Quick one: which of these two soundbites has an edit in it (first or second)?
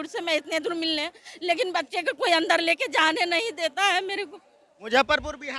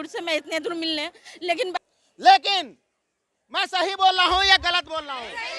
second